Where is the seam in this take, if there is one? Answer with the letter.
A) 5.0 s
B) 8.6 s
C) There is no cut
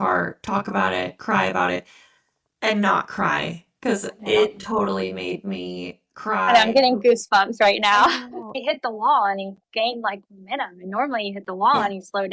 B